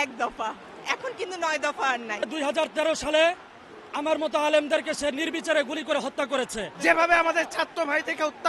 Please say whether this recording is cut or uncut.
cut